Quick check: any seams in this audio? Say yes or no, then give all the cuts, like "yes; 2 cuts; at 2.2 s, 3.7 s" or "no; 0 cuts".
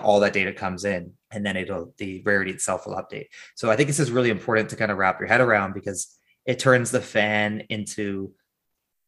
yes; 1 cut; at 1.2 s